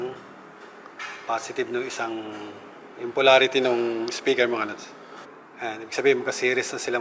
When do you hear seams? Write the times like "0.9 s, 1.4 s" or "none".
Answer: none